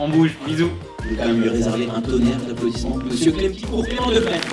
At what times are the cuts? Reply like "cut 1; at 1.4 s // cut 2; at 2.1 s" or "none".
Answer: cut 1; at 0.9 s